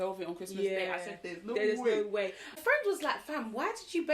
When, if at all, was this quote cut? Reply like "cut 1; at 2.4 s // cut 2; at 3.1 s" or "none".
cut 1; at 2.5 s